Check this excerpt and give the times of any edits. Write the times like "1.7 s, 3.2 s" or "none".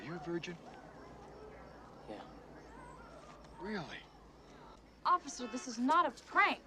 4.9 s

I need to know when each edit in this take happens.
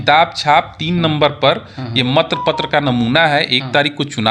none

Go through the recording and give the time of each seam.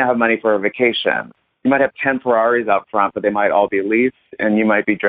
1.4 s

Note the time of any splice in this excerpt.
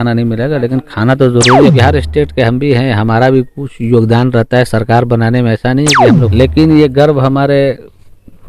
1.8 s, 6.3 s

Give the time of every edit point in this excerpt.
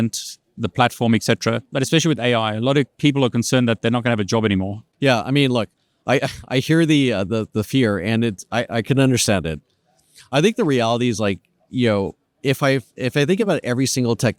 none

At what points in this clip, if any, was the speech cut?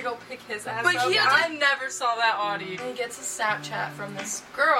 2.7 s

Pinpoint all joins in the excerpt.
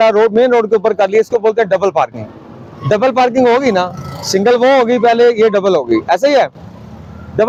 none

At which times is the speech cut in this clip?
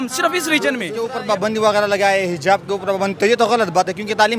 1.0 s

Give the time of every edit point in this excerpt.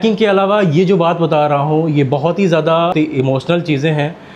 2.9 s

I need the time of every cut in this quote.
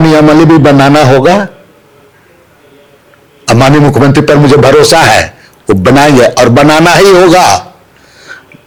none

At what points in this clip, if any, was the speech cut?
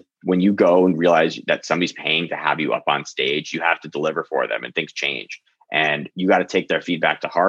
none

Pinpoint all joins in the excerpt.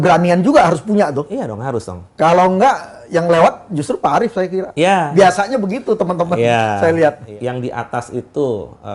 7.2 s

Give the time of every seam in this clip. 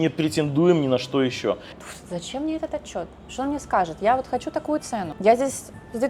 1.8 s, 5.1 s

